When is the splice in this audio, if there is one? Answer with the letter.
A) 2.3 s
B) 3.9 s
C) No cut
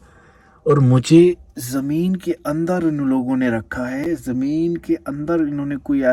C